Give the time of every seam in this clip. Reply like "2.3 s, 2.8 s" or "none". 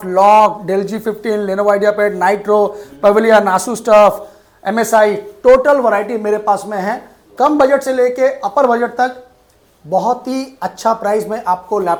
none